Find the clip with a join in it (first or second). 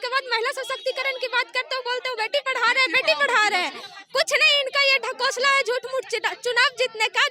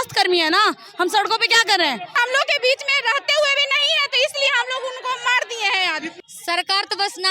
second